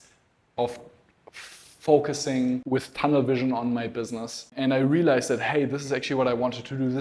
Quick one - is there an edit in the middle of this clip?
yes; 2 cuts; at 2.6 s, 4.5 s

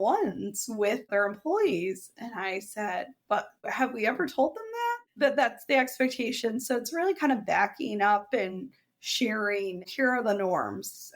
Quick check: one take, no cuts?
no; 3 cuts; at 1.1 s, 5.0 s, 9.9 s

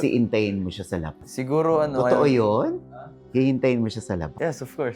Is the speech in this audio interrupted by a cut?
no; 0 cuts

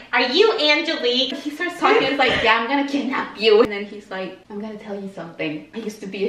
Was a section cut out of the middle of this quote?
yes; 2 cuts; at 1.3 s, 3.7 s

